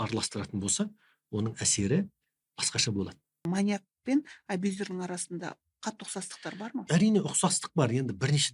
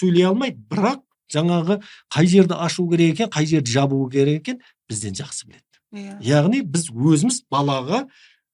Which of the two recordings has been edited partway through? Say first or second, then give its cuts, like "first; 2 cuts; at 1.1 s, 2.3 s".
first; 2 cuts; at 3.5 s, 6.8 s